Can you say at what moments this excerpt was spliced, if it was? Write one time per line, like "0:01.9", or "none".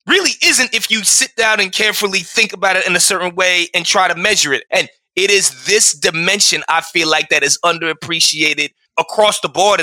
0:08.7